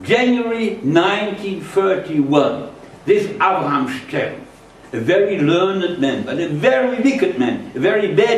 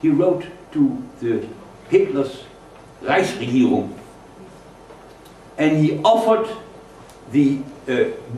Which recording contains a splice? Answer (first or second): second